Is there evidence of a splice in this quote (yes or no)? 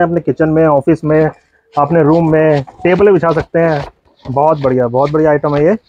no